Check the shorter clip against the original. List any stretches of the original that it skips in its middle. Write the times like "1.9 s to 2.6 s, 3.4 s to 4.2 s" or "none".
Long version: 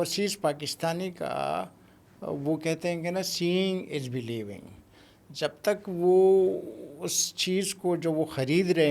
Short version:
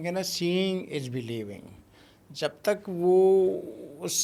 none